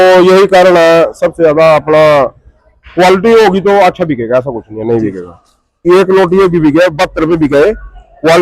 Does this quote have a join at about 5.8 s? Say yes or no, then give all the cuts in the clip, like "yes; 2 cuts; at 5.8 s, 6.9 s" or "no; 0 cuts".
yes; 1 cut; at 5.8 s